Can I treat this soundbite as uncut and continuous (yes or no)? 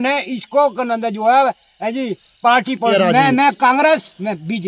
no